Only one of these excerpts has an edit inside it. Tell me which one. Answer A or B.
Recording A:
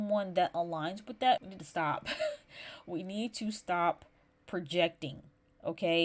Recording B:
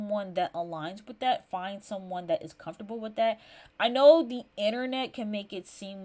A